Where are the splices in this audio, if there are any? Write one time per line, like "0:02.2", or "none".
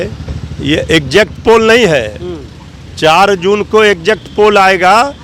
none